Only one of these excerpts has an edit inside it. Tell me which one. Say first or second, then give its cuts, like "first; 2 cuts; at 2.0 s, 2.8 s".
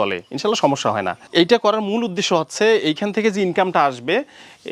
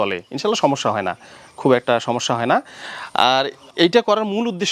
first; 1 cut; at 1.2 s